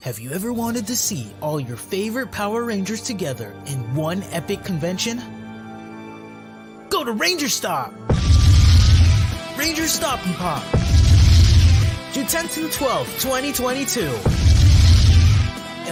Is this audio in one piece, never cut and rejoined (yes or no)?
yes